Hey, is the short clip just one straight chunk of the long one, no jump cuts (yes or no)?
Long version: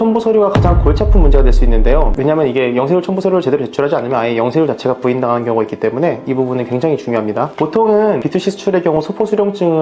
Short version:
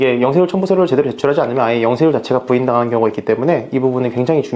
yes